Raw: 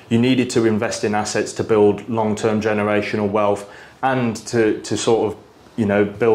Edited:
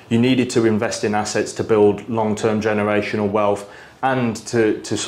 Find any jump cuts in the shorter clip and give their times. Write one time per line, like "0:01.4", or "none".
none